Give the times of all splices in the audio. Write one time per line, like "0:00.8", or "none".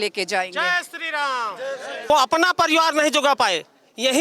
0:02.1